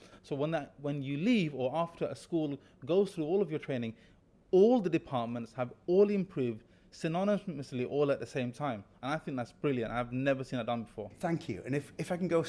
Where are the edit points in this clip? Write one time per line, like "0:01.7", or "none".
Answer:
none